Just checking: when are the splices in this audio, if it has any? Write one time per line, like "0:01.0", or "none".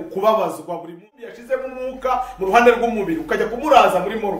0:01.4